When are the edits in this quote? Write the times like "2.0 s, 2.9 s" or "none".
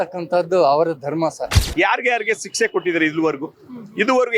1.6 s